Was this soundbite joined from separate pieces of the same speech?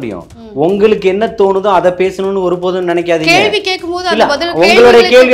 no; 0 cuts

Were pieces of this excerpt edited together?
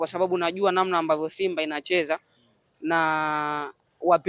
no; 0 cuts

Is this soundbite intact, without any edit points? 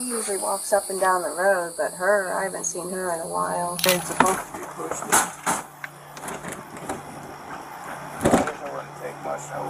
no; 1 cut; at 3.9 s

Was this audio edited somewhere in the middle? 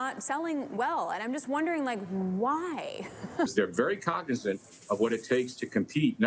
yes; 1 cut; at 3.5 s

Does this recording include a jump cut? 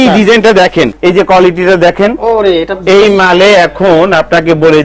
yes; 1 cut; at 0.9 s

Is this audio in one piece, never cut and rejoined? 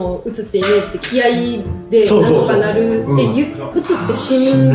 no; 1 cut; at 3.6 s

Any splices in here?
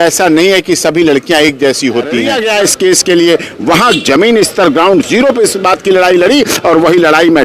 yes; 1 cut; at 2.3 s

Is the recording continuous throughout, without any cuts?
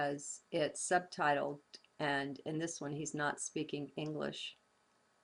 yes; 0 cuts

